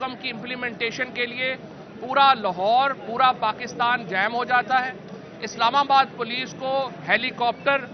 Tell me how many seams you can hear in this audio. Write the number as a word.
zero